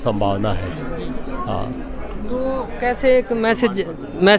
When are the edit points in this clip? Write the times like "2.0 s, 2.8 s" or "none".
none